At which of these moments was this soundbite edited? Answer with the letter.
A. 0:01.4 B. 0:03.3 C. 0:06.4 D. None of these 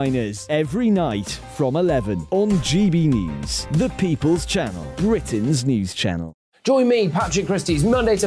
D